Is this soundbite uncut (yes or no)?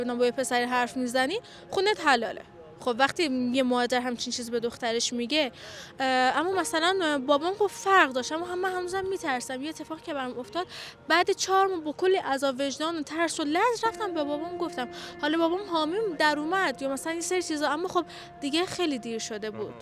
yes